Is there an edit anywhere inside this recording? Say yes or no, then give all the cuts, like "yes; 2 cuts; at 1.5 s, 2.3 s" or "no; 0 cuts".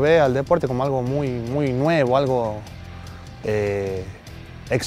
no; 0 cuts